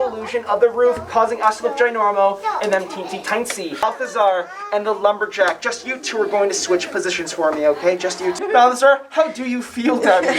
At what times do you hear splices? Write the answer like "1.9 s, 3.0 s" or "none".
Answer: 3.8 s, 8.4 s